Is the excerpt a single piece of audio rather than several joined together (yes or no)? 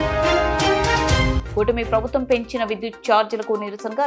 yes